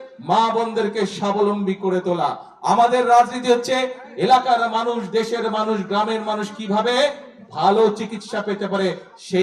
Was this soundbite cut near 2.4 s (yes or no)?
no